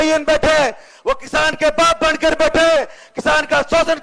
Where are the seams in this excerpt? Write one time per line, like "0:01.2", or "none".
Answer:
none